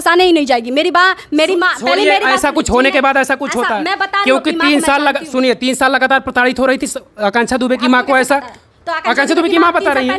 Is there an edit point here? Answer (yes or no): no